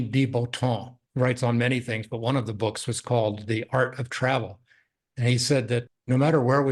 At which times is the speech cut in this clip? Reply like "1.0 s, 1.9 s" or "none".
1.0 s, 5.9 s